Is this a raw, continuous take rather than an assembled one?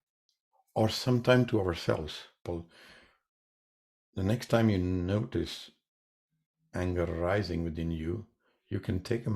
no; 1 cut; at 2.4 s

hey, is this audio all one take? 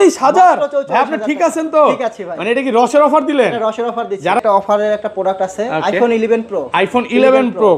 no; 1 cut; at 4.4 s

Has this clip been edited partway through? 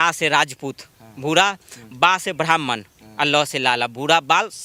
no; 0 cuts

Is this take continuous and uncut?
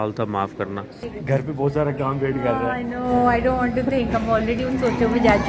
no; 1 cut; at 0.9 s

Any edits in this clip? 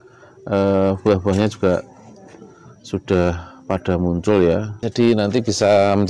yes; 1 cut; at 4.8 s

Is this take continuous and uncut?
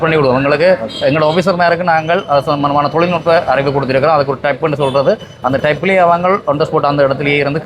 yes; 0 cuts

